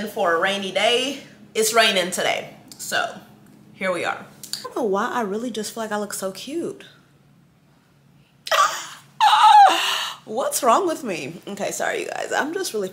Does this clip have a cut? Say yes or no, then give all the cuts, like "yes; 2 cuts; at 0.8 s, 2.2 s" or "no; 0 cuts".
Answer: yes; 1 cut; at 4.7 s